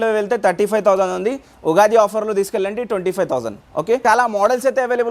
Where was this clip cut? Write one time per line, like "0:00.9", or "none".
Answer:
0:04.0